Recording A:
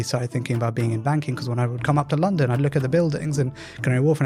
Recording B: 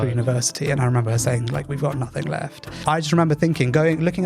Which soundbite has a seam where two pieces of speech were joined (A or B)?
B